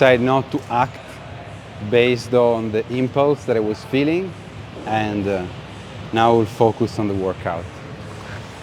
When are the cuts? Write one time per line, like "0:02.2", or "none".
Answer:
none

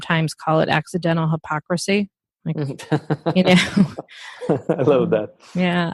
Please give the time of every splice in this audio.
none

